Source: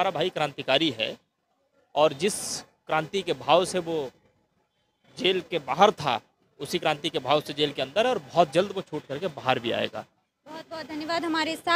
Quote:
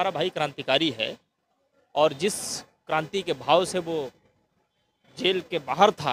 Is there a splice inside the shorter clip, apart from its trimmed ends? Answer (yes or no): no